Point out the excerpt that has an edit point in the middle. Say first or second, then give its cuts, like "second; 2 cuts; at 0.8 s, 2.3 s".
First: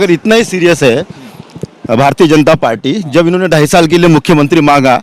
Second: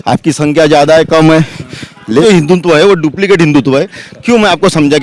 second; 1 cut; at 2.2 s